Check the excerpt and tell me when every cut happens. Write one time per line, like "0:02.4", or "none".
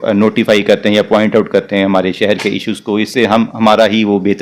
none